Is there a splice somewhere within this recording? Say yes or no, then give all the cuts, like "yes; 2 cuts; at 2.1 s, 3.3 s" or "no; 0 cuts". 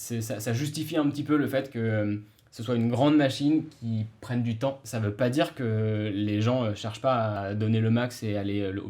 yes; 2 cuts; at 4.8 s, 7.4 s